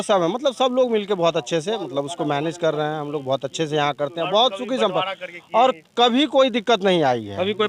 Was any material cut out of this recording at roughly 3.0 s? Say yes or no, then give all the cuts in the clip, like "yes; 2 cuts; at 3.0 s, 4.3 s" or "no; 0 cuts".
no; 0 cuts